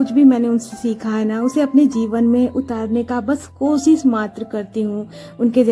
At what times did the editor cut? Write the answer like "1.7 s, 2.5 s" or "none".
none

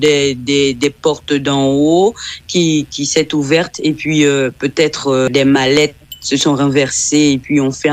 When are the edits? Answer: 5.3 s

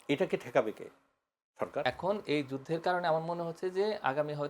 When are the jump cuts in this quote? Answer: 1.8 s

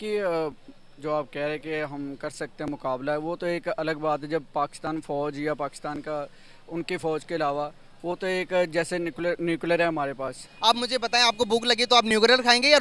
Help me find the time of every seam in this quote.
10.5 s

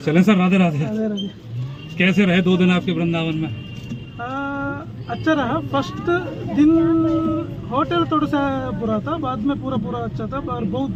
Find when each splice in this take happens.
none

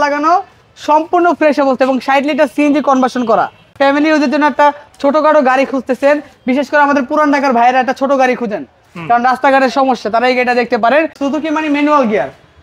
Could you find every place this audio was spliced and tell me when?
3.8 s, 11.2 s

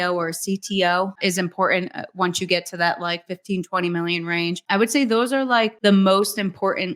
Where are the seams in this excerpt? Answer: 1.2 s, 4.6 s, 5.7 s

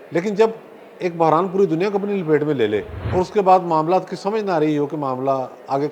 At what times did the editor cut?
3.0 s

